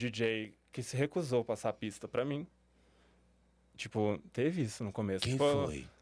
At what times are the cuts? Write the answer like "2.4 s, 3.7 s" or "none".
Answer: none

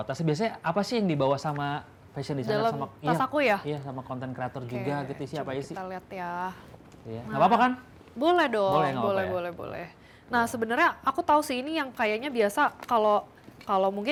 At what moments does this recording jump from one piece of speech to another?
none

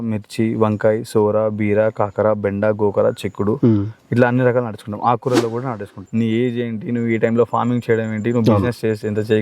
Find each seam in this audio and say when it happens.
6.0 s

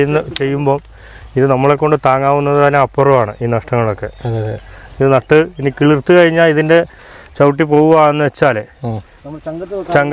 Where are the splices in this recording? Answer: none

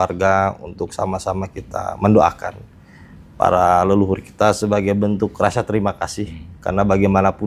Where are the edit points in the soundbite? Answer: none

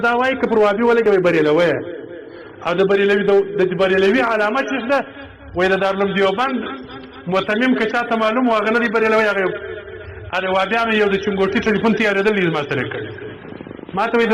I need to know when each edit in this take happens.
1.0 s

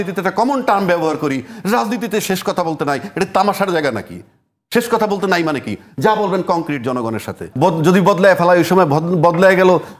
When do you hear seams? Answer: 7.5 s

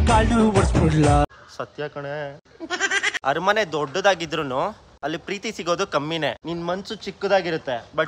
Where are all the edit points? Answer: 3.1 s

